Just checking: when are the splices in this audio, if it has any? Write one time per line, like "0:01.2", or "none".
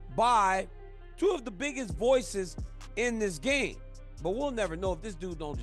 0:03.9